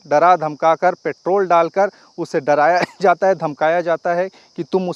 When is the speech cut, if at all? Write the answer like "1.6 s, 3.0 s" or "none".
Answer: none